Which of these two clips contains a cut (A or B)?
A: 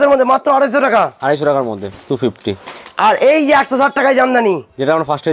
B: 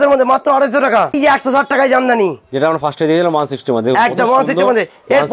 B